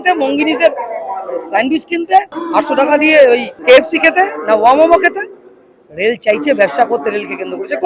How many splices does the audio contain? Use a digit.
2